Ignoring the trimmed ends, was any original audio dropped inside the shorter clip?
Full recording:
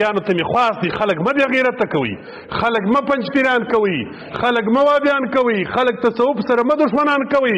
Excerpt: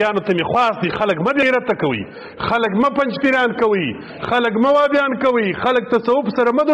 yes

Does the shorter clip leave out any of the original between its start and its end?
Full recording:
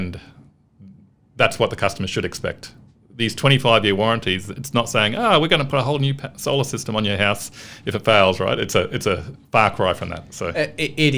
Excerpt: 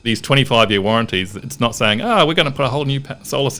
no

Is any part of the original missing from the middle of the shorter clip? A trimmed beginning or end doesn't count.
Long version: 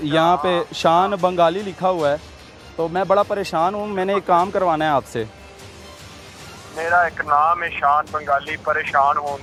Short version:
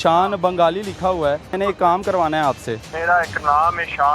yes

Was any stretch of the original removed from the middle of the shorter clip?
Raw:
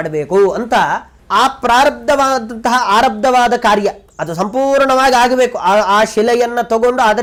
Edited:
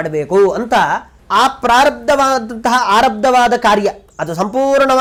no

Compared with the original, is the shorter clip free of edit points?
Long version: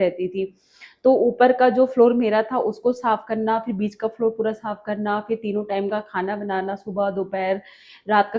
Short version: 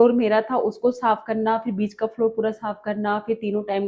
yes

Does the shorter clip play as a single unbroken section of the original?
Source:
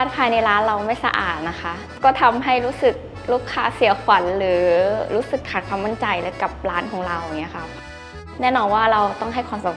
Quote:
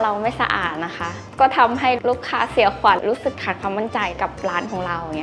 no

